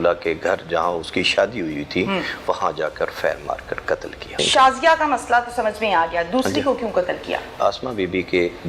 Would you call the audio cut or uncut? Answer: cut